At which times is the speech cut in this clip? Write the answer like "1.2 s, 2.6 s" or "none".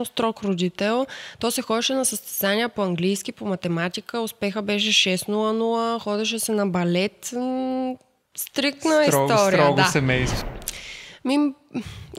10.4 s